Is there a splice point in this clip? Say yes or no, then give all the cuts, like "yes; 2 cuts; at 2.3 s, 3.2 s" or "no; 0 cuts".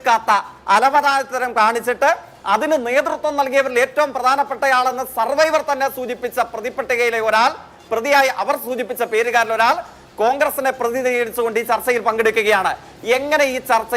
no; 0 cuts